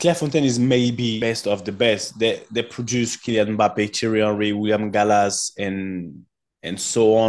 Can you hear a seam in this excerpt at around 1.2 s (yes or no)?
yes